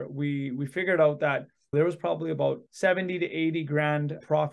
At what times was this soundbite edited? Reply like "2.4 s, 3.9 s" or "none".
1.7 s, 2.7 s